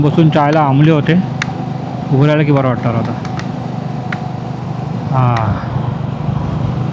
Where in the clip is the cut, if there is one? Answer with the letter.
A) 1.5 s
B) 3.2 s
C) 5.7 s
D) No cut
D